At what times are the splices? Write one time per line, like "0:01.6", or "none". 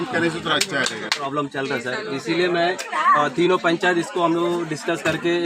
0:01.2